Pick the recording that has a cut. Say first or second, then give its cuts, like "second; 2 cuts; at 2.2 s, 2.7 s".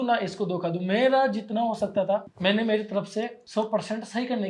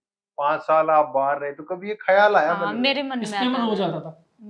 first; 2 cuts; at 2.3 s, 3.4 s